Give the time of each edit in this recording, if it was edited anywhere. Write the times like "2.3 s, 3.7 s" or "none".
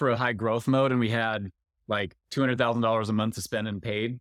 none